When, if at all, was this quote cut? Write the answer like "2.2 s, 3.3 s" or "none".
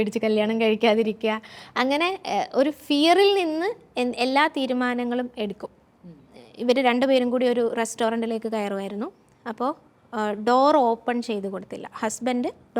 6.2 s